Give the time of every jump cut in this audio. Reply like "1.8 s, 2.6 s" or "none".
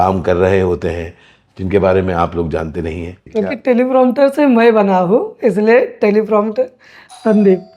3.2 s